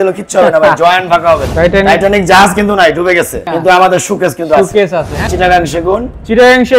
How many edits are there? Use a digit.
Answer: 2